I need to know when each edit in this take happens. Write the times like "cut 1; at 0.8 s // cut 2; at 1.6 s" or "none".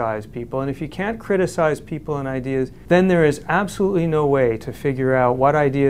cut 1; at 2.8 s